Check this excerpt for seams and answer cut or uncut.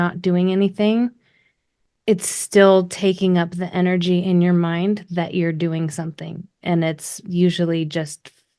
uncut